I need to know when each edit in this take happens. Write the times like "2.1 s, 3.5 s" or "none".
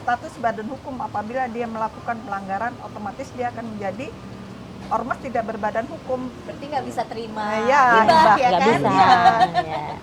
none